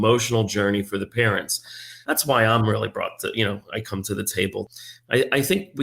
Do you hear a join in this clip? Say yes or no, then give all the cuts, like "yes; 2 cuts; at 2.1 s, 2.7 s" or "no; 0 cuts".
yes; 2 cuts; at 1.9 s, 4.7 s